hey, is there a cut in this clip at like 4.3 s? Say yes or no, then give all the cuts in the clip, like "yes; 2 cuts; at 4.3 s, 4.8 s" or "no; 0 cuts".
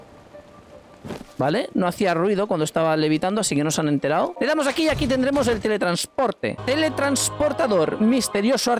yes; 2 cuts; at 4.3 s, 6.6 s